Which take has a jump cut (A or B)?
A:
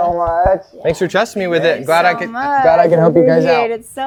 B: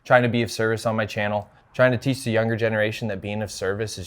B